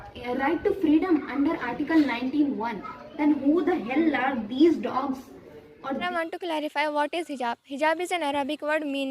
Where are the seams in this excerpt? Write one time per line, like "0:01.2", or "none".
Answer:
0:06.1